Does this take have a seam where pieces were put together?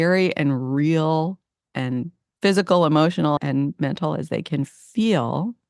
yes; 1 cut; at 3.4 s

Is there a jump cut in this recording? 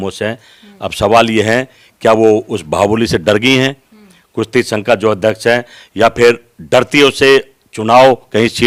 no; 0 cuts

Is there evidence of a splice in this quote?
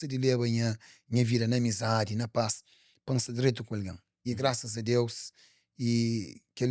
no; 0 cuts

